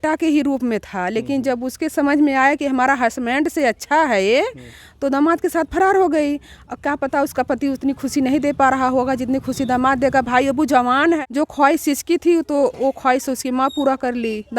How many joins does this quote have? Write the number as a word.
one